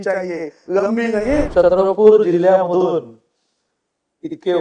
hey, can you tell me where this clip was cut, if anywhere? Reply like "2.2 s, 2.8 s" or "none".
1.5 s